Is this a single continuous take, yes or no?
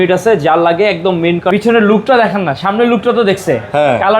no